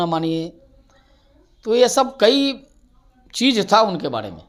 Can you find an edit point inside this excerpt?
no; 0 cuts

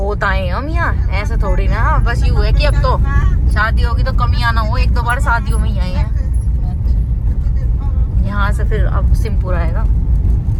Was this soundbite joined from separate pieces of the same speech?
no; 0 cuts

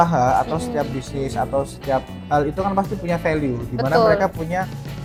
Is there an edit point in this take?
no; 0 cuts

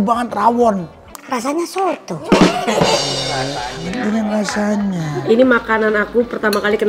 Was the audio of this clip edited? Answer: yes; 2 cuts; at 3.0 s, 5.1 s

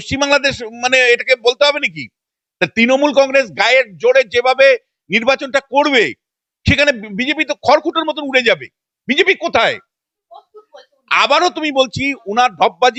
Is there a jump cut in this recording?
no; 0 cuts

